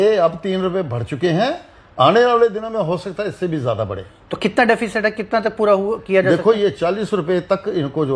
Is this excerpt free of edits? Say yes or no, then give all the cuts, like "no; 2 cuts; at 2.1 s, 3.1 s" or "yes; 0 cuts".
yes; 0 cuts